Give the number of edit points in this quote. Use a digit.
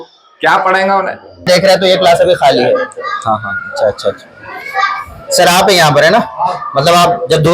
1